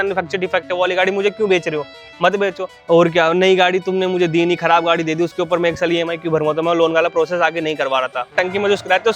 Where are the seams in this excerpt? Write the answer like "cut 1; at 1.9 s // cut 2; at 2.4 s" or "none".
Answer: cut 1; at 2.7 s // cut 2; at 8.3 s

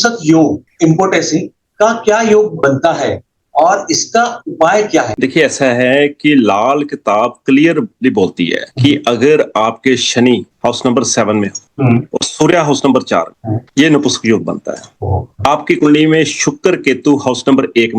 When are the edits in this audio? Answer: cut 1; at 5.1 s

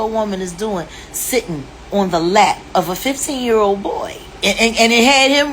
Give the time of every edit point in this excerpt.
none

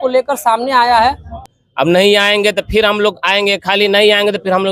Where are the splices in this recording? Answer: cut 1; at 1.3 s

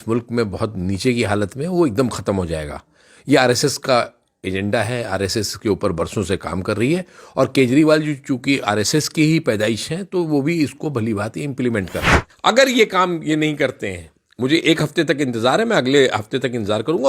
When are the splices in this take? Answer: cut 1; at 12.3 s

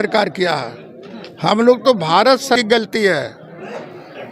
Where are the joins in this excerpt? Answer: cut 1; at 2.6 s

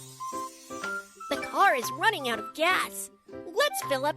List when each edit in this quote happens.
cut 1; at 1.2 s

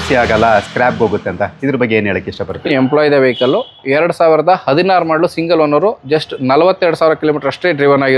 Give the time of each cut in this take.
cut 1; at 2.6 s

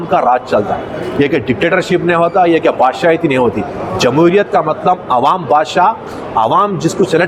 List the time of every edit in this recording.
none

